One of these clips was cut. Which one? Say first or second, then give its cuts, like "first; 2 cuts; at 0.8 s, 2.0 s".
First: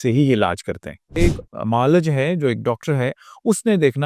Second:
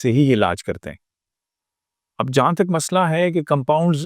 first; 1 cut; at 1.2 s